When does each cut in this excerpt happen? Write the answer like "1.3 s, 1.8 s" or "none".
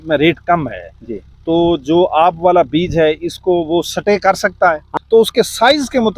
4.9 s